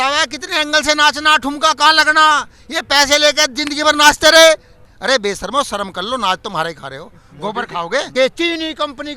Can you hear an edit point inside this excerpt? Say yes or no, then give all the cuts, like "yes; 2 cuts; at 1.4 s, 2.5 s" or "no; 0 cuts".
yes; 2 cuts; at 4.9 s, 8.1 s